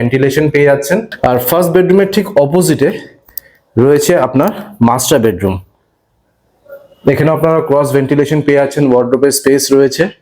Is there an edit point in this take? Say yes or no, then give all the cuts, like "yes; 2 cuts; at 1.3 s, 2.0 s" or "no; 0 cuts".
yes; 1 cut; at 1.1 s